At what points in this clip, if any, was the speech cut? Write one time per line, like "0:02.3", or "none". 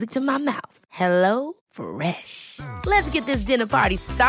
none